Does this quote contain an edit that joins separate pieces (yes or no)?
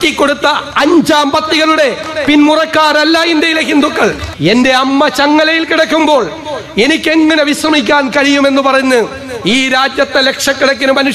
yes